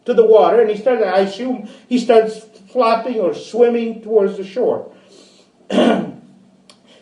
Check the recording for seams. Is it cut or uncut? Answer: uncut